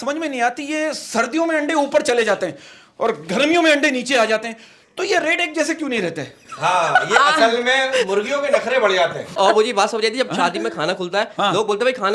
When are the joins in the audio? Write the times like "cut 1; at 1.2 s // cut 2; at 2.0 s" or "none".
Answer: cut 1; at 9.4 s